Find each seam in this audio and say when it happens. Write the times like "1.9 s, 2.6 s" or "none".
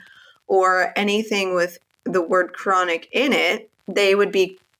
3.7 s